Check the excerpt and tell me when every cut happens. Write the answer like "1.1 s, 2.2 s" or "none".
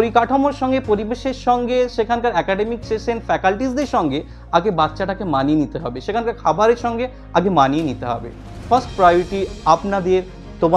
none